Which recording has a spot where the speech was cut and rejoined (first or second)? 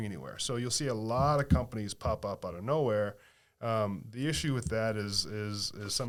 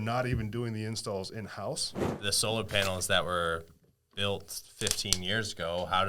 second